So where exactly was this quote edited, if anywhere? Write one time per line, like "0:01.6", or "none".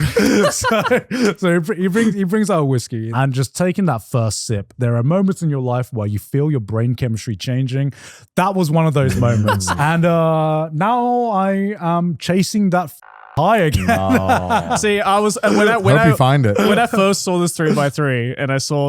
0:03.1
0:04.7
0:09.7